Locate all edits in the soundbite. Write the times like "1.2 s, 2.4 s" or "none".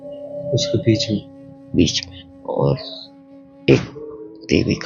none